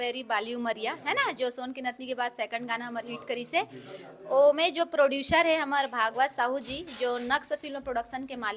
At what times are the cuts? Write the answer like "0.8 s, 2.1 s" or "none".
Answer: none